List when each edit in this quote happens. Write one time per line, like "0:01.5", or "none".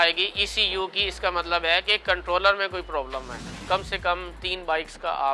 0:03.6